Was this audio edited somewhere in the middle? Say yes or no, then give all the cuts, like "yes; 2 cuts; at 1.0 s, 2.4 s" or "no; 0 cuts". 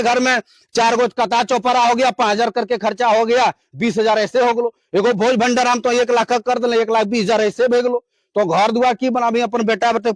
no; 0 cuts